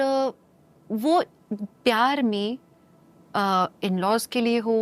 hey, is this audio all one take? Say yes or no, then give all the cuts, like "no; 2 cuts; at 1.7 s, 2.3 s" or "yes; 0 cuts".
yes; 0 cuts